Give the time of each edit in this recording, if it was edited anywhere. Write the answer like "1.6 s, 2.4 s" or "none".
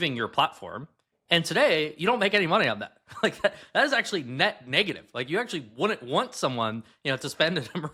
none